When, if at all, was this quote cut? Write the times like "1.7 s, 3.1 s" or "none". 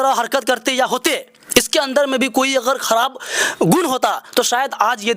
none